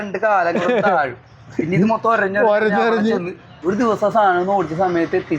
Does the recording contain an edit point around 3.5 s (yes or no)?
yes